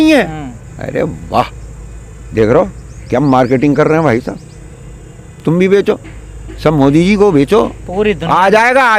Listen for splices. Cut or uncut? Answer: uncut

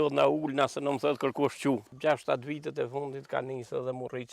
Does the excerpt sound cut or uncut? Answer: cut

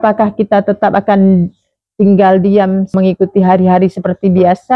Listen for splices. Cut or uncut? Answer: cut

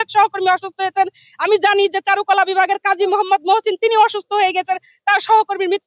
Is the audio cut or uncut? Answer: uncut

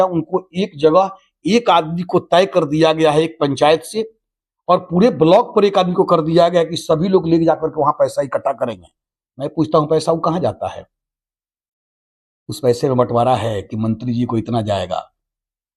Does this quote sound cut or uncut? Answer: uncut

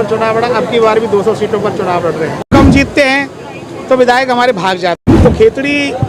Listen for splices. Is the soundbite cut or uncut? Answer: cut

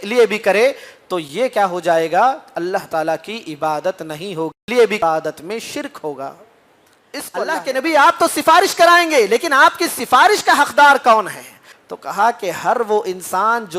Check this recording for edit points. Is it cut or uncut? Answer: cut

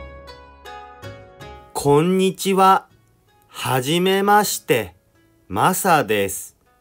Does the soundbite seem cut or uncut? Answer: cut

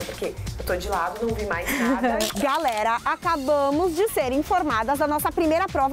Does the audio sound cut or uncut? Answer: cut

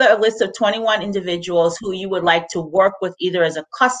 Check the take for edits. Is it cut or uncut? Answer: uncut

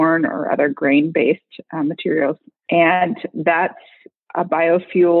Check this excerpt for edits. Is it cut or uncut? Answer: cut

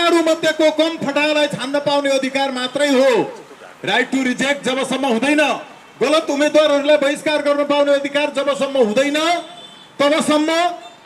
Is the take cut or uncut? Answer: uncut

